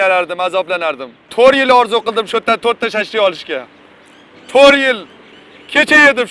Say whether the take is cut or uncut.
cut